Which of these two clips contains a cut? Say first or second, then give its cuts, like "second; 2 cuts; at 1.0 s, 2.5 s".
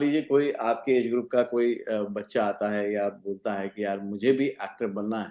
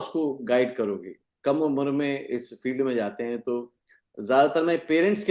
second; 1 cut; at 1.3 s